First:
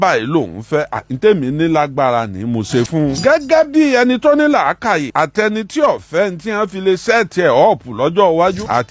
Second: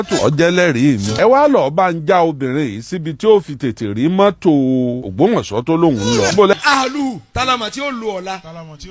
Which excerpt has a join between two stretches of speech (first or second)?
second